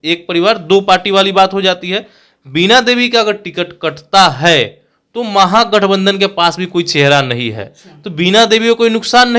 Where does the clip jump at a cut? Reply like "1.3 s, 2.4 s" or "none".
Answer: none